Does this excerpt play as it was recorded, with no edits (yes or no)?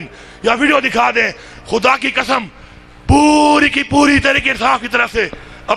yes